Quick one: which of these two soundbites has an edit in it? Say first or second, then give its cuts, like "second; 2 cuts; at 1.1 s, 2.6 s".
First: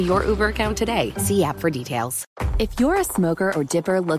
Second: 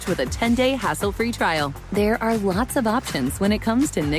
first; 2 cuts; at 1.2 s, 2.2 s